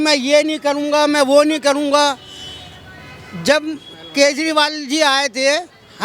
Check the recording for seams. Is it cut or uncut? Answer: uncut